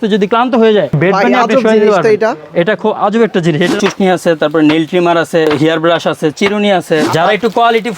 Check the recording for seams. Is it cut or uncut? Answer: cut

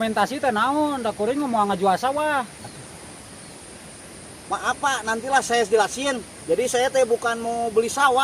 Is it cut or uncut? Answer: cut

